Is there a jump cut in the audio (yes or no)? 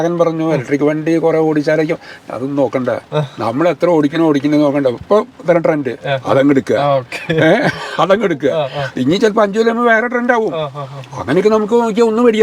no